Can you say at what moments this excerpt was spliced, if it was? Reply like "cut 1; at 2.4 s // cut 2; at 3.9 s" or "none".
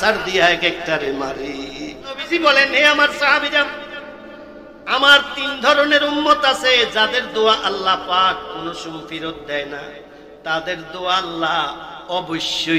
cut 1; at 2.2 s